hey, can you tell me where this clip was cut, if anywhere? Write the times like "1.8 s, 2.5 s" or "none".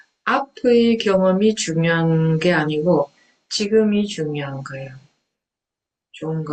none